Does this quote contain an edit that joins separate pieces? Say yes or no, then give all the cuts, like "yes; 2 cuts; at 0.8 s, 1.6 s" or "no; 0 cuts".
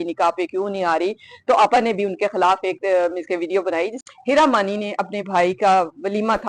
yes; 1 cut; at 4.0 s